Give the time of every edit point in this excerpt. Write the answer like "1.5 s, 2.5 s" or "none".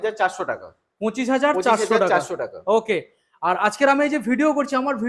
none